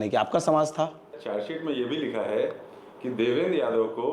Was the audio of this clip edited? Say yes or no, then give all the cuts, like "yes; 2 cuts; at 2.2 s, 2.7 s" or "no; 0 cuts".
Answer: yes; 1 cut; at 1.2 s